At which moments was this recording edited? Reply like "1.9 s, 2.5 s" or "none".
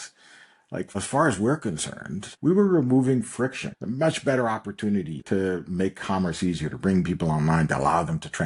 0.9 s, 2.3 s, 3.7 s, 5.2 s